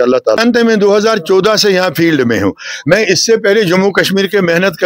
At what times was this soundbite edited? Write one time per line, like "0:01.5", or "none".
0:03.2